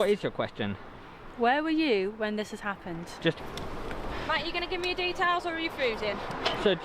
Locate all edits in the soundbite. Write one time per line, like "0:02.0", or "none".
0:03.4